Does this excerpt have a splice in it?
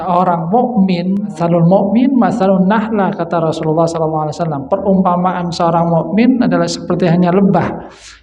yes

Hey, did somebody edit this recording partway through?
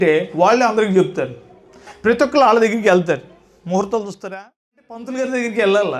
yes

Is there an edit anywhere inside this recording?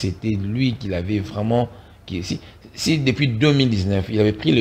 no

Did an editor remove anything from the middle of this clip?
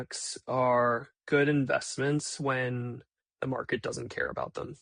yes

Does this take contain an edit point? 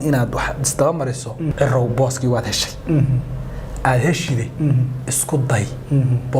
yes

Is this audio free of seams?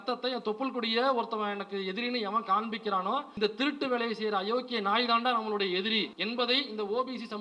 no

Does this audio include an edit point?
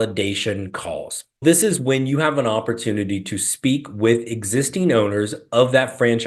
yes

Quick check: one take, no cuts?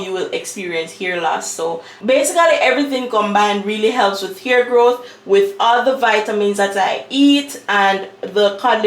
no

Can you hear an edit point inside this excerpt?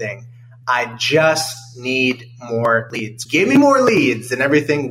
yes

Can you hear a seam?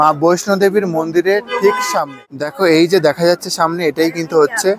yes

